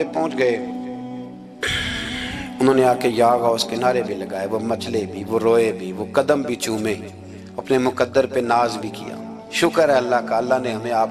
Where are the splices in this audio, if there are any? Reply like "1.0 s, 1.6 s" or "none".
none

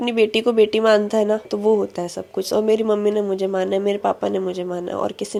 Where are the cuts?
none

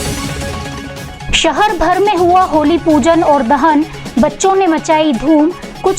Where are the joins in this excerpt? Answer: 1.1 s

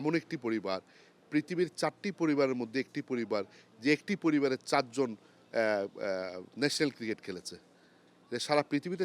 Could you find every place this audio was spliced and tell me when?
none

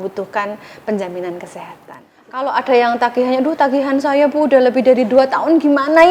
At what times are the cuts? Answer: 2.4 s

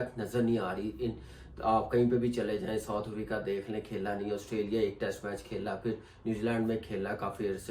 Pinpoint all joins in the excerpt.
none

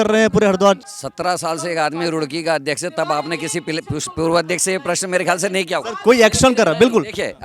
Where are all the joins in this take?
0.9 s

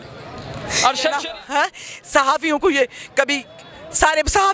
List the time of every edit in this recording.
1.2 s

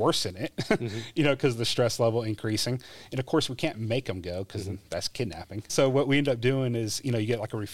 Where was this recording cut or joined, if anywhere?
5.7 s

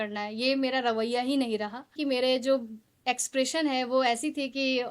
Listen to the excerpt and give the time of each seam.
2.0 s

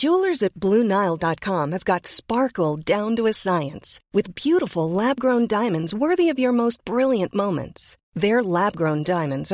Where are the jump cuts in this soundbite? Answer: none

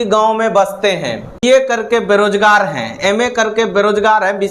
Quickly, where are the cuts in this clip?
1.4 s

